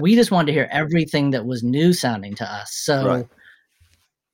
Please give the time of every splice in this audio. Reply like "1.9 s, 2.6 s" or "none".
none